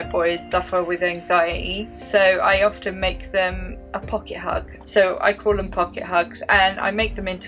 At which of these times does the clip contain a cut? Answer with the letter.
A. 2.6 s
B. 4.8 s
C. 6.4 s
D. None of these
B